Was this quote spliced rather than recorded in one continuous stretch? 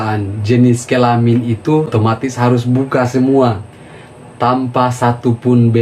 yes; 1 cut; at 1.9 s

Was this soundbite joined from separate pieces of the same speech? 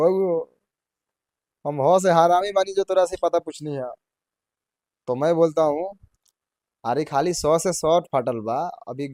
no; 0 cuts

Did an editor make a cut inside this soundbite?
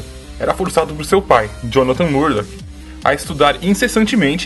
yes; 1 cut; at 2.4 s

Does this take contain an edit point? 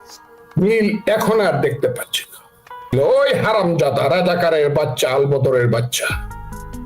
yes; 1 cut; at 2.9 s

